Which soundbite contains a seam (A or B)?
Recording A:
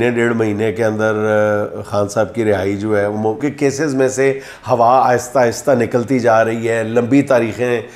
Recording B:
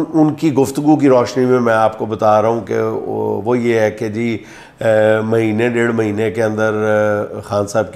A